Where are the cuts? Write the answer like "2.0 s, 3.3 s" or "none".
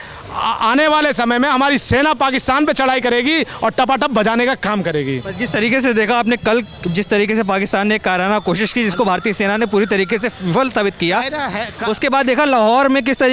none